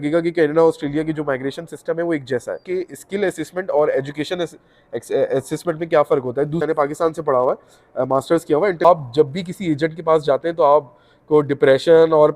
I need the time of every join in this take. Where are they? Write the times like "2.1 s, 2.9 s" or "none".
2.6 s, 6.6 s, 8.8 s